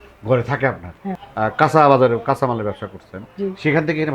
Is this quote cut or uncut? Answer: cut